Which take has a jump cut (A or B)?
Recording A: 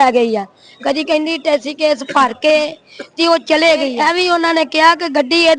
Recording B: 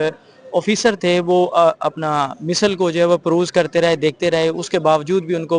A